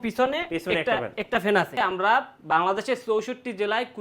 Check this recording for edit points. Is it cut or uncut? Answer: cut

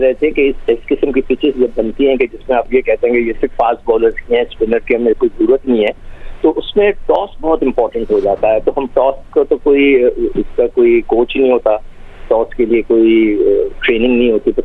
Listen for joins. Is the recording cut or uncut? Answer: uncut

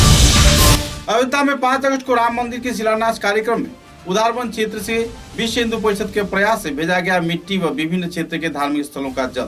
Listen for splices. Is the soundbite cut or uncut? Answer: uncut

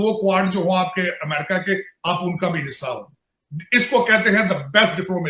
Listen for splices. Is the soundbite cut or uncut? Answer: uncut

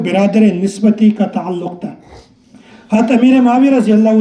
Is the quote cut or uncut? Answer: uncut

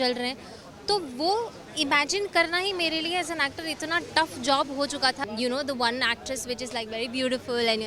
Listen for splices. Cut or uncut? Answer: cut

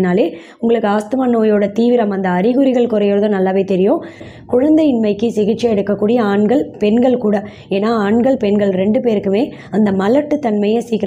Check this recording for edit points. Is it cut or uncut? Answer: cut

